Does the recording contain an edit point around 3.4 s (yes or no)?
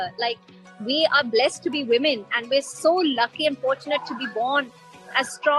no